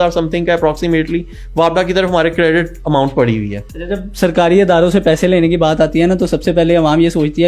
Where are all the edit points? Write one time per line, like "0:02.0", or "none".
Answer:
none